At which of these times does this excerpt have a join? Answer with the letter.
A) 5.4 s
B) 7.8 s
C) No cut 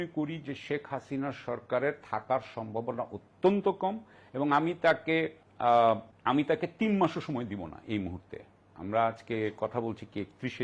A